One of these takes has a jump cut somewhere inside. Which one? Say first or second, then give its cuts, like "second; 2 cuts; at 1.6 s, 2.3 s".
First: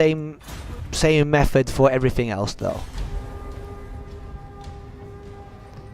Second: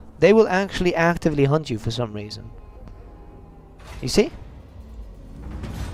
first; 1 cut; at 1.2 s